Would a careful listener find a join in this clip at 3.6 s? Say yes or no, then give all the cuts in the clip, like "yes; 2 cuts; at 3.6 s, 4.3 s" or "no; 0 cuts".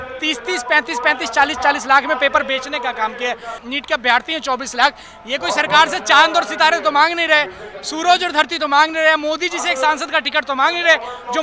yes; 1 cut; at 3.6 s